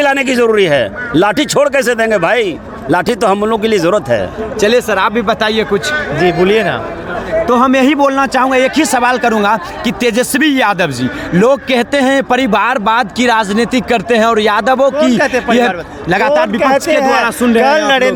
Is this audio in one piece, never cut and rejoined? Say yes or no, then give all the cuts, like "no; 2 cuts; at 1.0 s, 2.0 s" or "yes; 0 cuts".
yes; 0 cuts